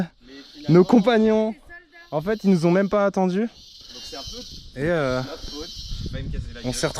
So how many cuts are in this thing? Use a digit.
0